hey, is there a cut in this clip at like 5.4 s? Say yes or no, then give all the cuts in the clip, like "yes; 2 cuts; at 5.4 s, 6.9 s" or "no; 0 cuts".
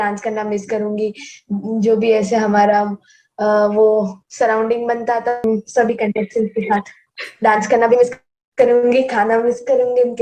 yes; 1 cut; at 5.4 s